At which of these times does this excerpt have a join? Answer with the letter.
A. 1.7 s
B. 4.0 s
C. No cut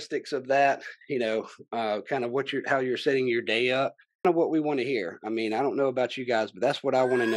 B